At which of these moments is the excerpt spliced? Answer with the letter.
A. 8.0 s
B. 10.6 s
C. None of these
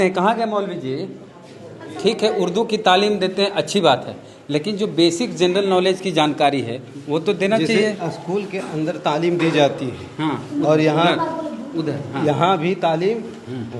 C